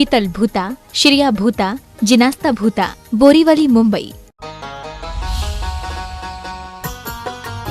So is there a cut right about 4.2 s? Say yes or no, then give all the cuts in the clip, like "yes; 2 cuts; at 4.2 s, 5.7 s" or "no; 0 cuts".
yes; 1 cut; at 4.2 s